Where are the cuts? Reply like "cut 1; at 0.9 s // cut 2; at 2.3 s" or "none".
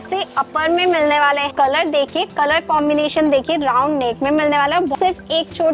cut 1; at 1.5 s // cut 2; at 4.9 s